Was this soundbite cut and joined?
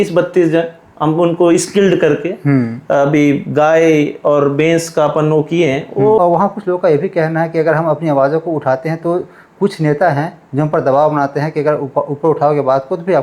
yes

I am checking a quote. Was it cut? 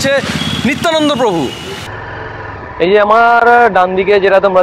yes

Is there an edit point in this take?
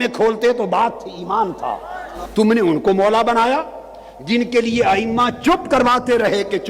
yes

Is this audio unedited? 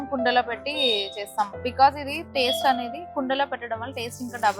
yes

